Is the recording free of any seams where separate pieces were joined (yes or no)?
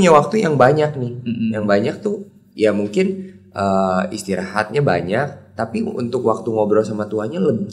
yes